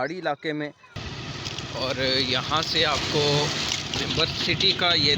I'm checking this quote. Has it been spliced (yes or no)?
yes